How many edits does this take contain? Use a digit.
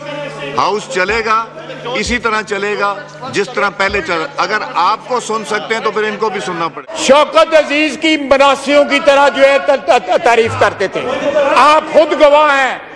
2